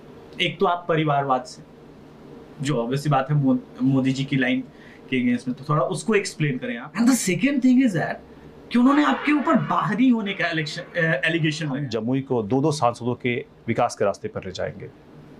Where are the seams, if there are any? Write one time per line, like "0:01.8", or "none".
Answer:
0:06.8
0:11.8